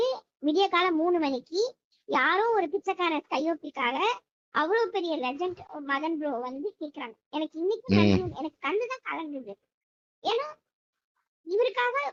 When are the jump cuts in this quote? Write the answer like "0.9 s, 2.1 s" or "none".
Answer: none